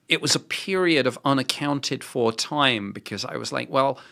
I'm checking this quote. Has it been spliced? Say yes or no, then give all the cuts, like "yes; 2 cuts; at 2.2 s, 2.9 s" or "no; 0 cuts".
no; 0 cuts